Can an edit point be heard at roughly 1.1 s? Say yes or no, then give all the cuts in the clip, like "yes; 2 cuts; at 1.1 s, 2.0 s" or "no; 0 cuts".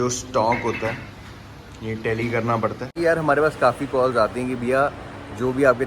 no; 1 cut; at 2.9 s